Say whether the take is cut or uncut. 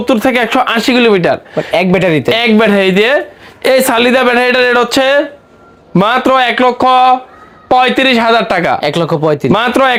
uncut